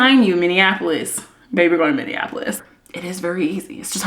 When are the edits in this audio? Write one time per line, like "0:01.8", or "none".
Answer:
0:02.5